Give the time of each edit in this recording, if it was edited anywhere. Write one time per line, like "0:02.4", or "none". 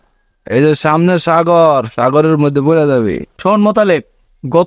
0:03.2